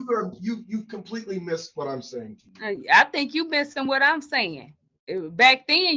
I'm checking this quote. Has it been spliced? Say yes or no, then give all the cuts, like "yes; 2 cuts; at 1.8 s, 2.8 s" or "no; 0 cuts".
no; 0 cuts